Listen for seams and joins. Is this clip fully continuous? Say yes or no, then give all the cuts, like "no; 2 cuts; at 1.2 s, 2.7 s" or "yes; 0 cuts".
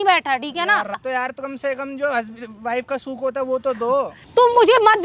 no; 2 cuts; at 1.0 s, 4.2 s